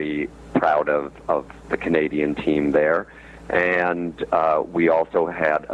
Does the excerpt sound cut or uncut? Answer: uncut